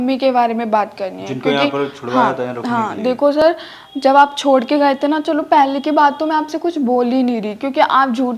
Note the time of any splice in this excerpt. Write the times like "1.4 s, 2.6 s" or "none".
none